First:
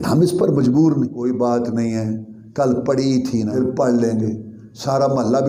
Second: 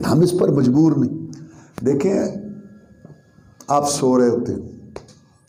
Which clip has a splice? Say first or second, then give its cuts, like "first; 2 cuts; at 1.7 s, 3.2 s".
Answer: first; 2 cuts; at 1.2 s, 3.5 s